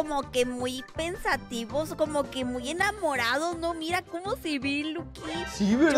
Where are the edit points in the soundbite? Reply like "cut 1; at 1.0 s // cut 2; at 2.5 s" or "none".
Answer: none